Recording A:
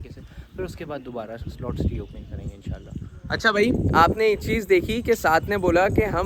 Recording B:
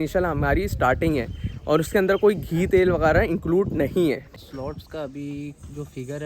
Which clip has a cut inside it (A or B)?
B